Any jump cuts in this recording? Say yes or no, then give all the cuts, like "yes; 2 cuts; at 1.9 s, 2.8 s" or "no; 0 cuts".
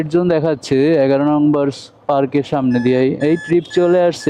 no; 0 cuts